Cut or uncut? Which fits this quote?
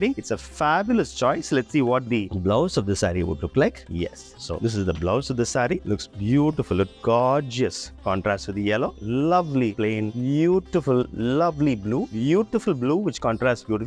uncut